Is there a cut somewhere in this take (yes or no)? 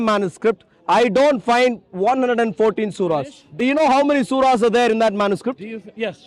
no